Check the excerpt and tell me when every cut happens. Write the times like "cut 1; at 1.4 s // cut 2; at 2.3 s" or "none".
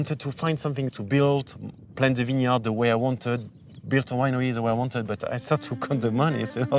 cut 1; at 0.9 s